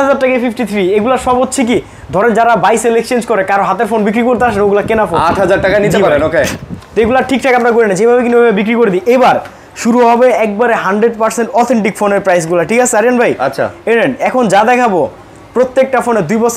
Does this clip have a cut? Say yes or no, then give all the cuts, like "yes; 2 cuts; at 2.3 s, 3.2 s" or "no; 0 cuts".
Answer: no; 0 cuts